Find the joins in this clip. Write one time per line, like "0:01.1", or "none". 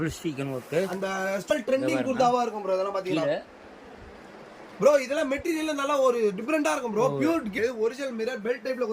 0:01.5
0:07.6